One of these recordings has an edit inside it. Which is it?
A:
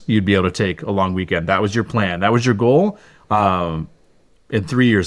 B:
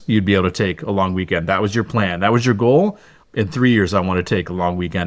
B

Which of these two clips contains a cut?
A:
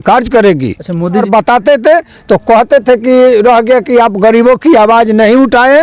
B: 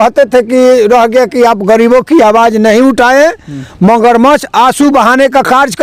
A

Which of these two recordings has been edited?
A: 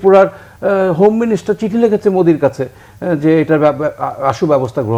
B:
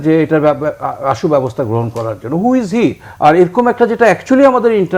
B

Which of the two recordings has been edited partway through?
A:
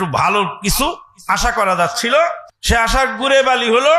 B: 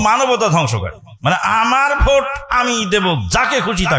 A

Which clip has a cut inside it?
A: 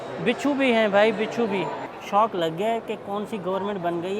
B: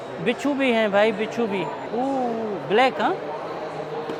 A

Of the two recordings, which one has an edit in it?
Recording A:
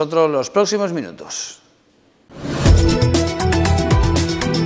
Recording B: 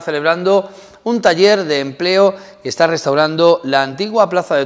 B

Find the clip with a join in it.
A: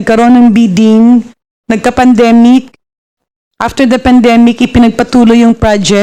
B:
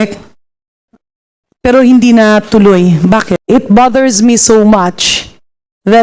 B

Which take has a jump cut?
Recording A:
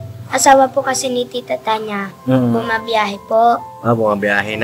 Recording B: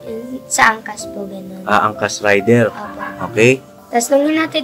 B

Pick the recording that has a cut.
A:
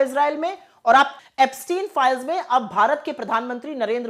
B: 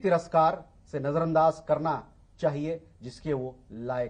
A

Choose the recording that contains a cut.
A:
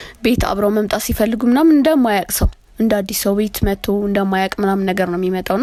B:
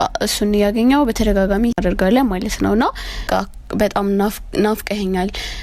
B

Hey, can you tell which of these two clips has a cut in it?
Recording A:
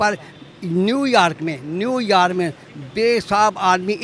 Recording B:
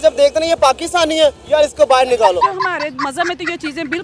B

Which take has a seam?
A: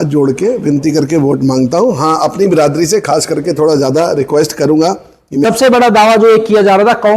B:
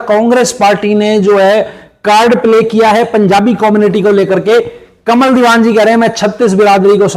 A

